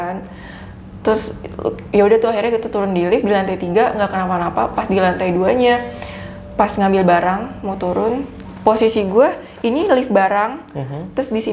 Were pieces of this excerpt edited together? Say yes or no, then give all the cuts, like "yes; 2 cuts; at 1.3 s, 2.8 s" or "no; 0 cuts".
no; 0 cuts